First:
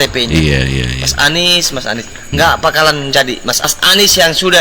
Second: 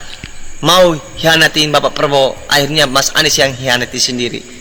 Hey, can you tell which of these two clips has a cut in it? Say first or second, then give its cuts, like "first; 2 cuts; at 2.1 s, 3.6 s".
first; 1 cut; at 3.7 s